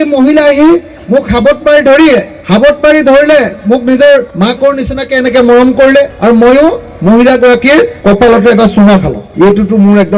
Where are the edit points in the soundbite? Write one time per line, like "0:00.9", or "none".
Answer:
0:02.4
0:04.3
0:06.1
0:08.0
0:09.2

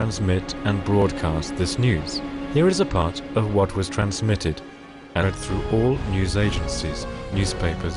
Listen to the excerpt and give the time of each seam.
none

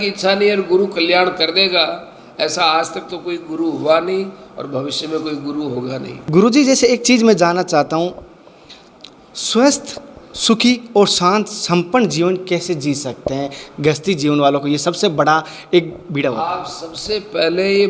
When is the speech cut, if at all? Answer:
0:06.1

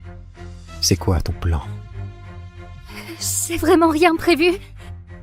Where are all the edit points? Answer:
0:01.7
0:03.1

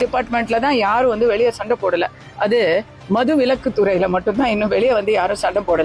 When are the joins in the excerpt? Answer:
none

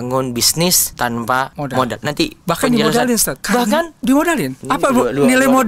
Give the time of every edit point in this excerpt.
0:01.3
0:03.3
0:04.5

